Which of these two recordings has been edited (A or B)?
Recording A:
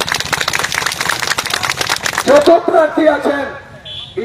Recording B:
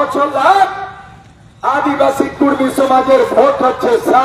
A